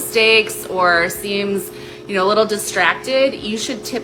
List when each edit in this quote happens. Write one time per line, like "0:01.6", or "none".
none